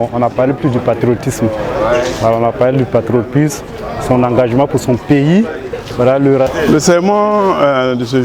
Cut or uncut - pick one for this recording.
cut